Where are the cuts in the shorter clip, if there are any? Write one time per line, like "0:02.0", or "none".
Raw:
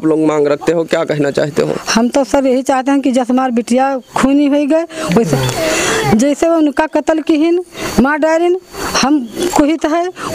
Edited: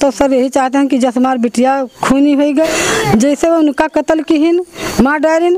0:02.7